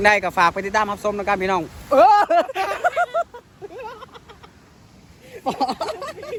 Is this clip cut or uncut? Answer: uncut